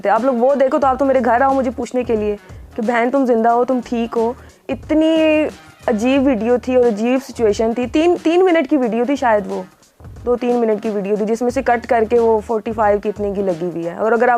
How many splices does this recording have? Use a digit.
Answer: 0